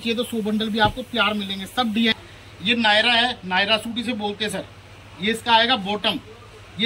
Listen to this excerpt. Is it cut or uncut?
cut